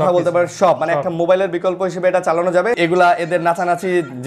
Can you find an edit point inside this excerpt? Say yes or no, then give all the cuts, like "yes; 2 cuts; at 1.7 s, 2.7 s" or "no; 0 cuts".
yes; 1 cut; at 2.8 s